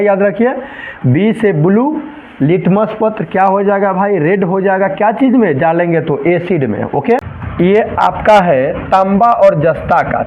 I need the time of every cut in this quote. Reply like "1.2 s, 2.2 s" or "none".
7.4 s